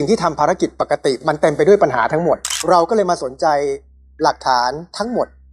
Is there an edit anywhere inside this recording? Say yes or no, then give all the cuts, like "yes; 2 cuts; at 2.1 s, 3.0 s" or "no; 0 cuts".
yes; 1 cut; at 2.6 s